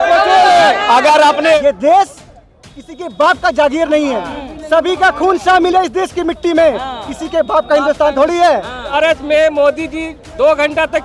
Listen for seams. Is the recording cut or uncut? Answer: cut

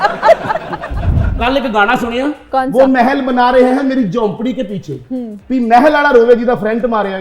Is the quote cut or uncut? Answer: cut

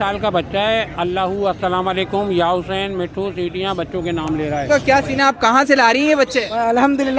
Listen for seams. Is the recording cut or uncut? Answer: cut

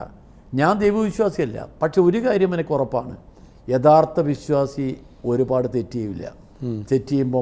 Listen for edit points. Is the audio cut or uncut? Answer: uncut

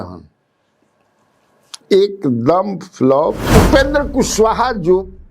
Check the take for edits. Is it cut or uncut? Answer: cut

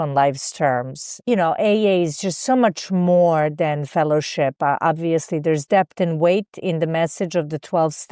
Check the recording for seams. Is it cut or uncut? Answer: cut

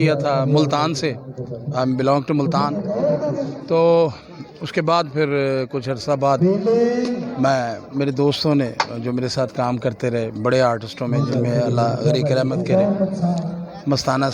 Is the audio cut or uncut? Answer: uncut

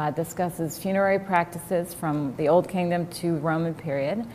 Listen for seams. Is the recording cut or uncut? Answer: uncut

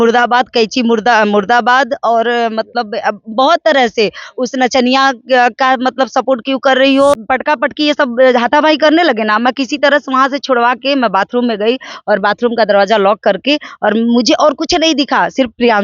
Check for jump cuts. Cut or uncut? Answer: cut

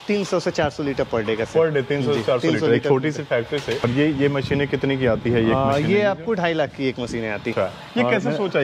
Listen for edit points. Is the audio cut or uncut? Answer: cut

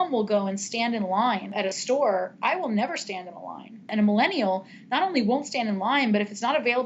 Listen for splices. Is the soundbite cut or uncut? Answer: cut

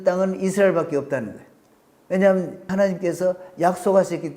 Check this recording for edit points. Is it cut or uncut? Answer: cut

